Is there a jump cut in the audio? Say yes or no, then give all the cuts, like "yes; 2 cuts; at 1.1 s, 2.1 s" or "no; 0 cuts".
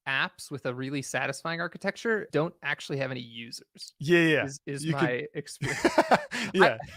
no; 0 cuts